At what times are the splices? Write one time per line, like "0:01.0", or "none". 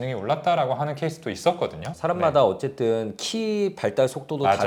none